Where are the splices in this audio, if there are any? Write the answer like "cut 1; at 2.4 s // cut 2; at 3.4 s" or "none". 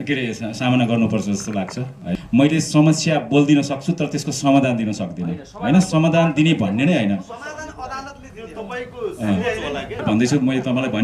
cut 1; at 2.1 s // cut 2; at 9.9 s